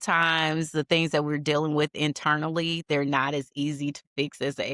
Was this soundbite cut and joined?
no; 0 cuts

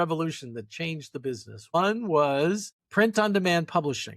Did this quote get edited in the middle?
yes; 2 cuts; at 1.7 s, 2.7 s

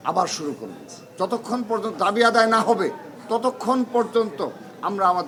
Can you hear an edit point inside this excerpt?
no; 0 cuts

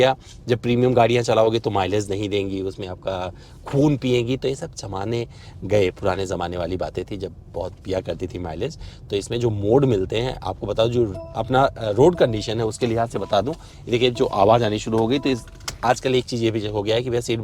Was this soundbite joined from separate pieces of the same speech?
no; 0 cuts

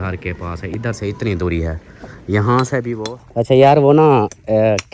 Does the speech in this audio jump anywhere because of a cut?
yes; 1 cut; at 2.9 s

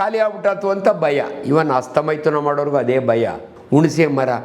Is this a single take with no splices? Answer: no; 1 cut; at 3.5 s

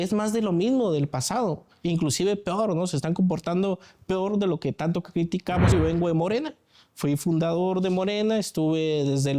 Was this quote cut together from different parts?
yes; 1 cut; at 5.7 s

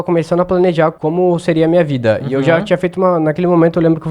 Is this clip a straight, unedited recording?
no; 1 cut; at 1.0 s

